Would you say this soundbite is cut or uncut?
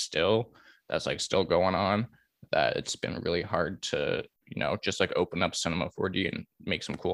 cut